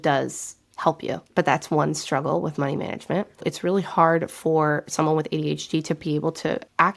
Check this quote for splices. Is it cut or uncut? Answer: cut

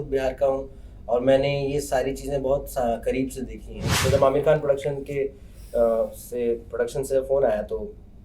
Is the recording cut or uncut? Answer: cut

